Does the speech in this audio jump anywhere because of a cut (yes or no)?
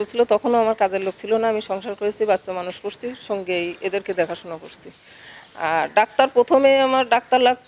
no